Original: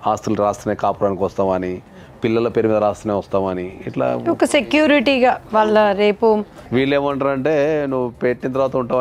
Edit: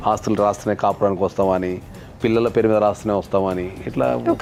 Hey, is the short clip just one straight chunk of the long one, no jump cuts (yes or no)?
yes